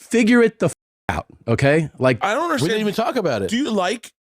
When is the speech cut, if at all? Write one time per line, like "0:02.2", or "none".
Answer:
0:02.2